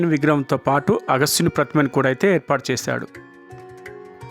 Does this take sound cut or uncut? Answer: cut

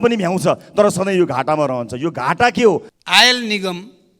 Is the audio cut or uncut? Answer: cut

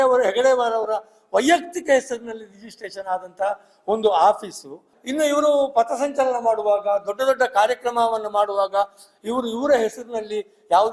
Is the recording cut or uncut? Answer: cut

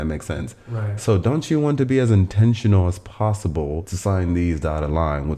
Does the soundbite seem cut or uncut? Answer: cut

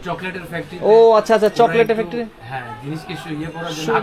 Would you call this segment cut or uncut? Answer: uncut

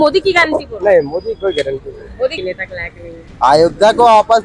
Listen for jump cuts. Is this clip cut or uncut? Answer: cut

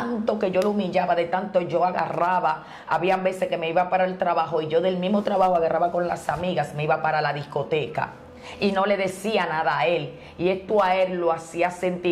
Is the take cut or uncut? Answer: uncut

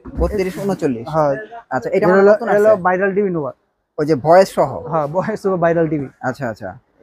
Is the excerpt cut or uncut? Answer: uncut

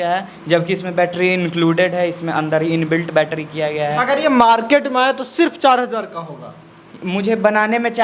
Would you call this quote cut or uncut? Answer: uncut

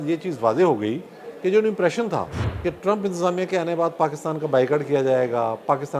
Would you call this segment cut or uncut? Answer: cut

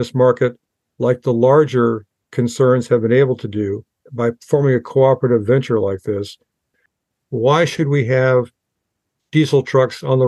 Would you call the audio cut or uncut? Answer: cut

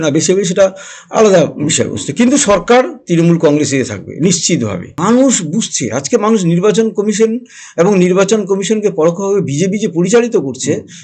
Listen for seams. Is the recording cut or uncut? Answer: cut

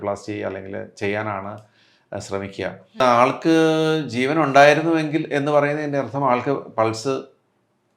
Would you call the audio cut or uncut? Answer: cut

